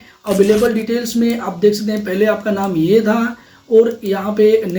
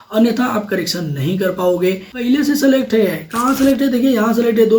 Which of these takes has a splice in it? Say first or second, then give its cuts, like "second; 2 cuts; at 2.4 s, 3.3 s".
second; 1 cut; at 2.1 s